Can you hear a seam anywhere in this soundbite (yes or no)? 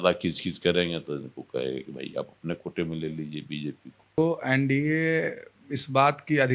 yes